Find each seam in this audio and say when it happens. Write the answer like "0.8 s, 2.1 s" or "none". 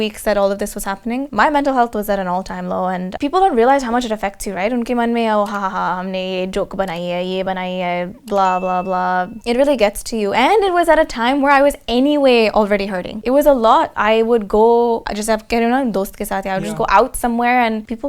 none